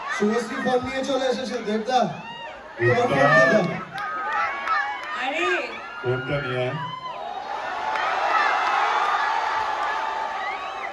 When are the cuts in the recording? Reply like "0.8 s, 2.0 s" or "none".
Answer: none